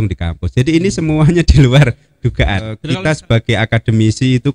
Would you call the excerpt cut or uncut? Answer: cut